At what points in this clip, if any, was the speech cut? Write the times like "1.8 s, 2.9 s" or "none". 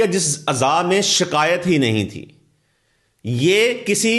none